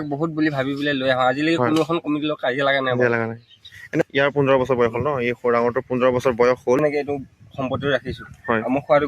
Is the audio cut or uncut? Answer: cut